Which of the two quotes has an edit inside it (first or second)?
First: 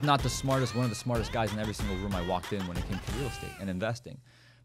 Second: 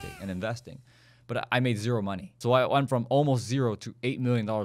second